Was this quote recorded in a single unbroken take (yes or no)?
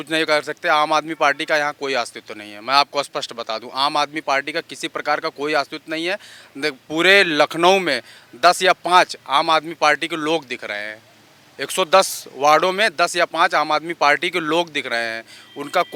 yes